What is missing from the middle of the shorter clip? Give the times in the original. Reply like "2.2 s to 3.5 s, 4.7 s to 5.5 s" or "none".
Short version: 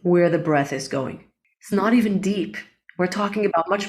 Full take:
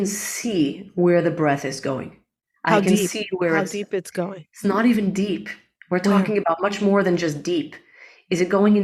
2.4 s to 4.4 s